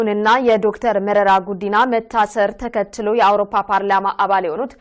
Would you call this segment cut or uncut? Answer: cut